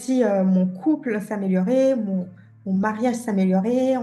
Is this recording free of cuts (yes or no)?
yes